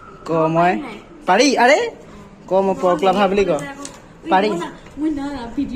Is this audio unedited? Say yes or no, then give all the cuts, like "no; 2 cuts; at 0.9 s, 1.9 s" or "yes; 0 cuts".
yes; 0 cuts